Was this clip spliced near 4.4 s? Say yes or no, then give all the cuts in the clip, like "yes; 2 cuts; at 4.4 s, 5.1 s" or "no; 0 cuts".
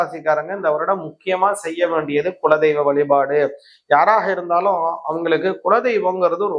no; 0 cuts